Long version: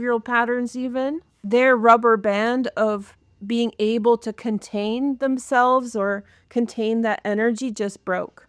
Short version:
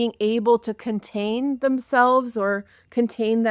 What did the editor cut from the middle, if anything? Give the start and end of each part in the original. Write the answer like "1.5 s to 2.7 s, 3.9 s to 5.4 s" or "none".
none